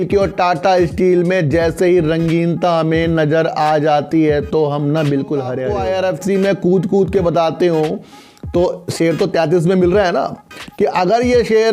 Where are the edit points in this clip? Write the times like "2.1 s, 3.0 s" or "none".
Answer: 5.7 s